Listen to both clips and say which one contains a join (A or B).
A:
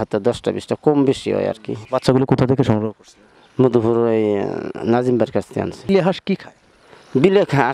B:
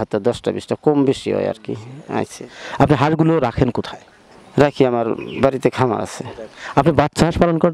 A